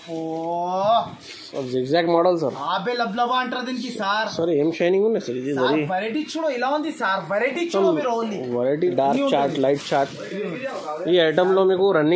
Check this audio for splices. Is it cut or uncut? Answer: cut